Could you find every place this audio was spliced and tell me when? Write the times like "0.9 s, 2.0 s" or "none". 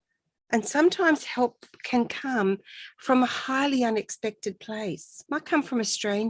5.1 s